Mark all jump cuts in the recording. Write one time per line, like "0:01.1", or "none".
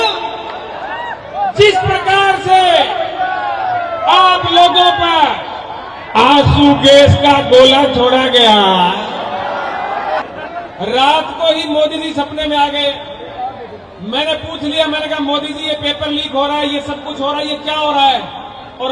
0:10.2